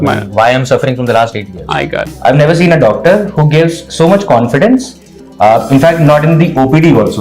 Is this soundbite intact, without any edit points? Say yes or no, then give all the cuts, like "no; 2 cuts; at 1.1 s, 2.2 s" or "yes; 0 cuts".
no; 1 cut; at 2.1 s